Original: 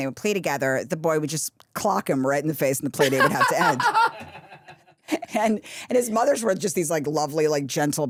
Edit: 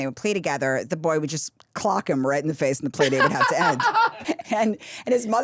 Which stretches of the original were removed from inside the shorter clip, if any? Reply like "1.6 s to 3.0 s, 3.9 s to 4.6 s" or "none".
4.2 s to 5.0 s